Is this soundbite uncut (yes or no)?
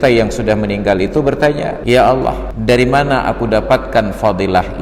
no